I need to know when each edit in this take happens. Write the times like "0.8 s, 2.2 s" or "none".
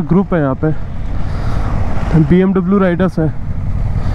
none